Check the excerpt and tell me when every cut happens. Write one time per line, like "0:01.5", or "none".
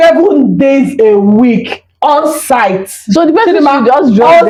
none